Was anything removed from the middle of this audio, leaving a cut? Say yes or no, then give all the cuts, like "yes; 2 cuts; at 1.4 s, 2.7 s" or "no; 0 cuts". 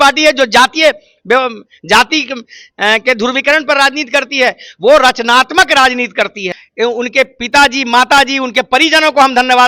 yes; 1 cut; at 6.6 s